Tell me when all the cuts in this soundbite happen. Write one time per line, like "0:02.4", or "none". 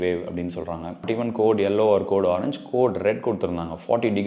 0:01.0